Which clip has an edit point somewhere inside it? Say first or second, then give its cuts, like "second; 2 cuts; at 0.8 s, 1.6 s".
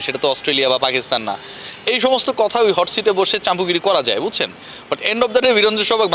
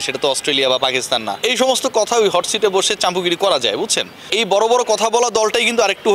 second; 2 cuts; at 1.3 s, 4.3 s